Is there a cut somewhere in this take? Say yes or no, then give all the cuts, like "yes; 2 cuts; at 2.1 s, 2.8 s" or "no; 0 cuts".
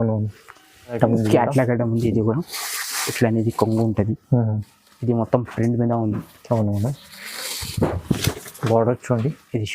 yes; 1 cut; at 1.0 s